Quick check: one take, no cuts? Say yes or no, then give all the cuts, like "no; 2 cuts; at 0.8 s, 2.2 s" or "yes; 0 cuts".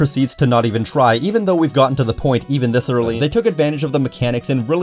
no; 1 cut; at 3.2 s